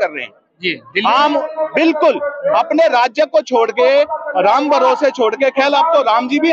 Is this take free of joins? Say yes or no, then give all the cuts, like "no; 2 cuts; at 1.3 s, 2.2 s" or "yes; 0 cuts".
yes; 0 cuts